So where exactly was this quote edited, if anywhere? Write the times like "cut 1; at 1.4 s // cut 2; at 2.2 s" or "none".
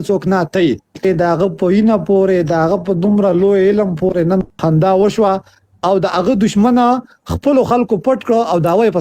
cut 1; at 1.1 s

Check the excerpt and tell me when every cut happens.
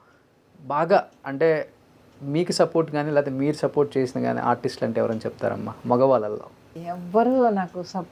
cut 1; at 6.7 s

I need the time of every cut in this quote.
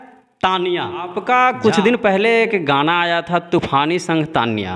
cut 1; at 1.2 s

